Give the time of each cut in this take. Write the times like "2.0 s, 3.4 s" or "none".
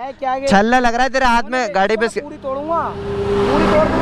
none